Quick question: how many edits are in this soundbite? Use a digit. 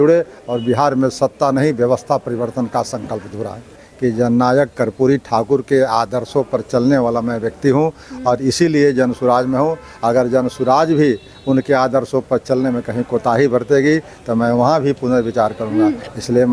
1